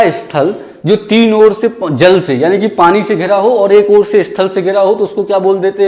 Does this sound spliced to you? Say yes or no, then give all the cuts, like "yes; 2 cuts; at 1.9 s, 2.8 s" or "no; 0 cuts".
no; 0 cuts